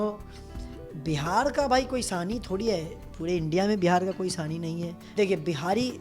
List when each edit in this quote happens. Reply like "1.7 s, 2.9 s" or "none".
5.0 s